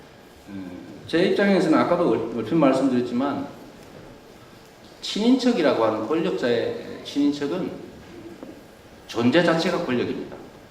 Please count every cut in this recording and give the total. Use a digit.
1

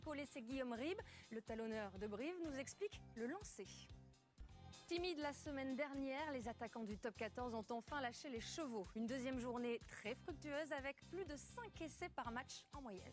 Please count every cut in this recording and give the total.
1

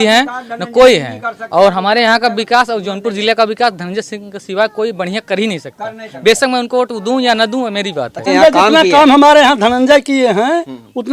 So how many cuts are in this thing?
1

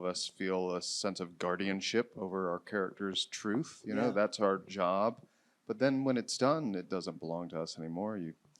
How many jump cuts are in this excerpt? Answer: 0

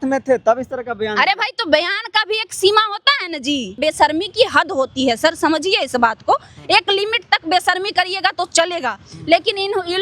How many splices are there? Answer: 1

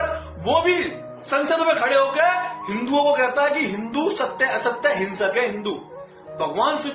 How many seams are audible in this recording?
0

